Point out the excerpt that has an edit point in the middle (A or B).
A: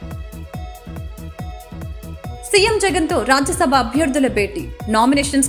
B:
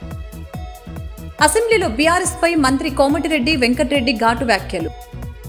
A